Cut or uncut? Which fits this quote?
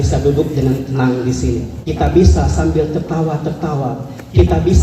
cut